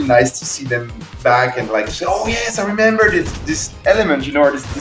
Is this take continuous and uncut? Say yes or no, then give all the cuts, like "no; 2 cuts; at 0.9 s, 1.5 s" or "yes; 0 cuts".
yes; 0 cuts